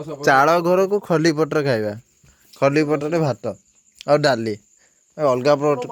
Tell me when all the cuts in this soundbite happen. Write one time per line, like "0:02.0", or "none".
none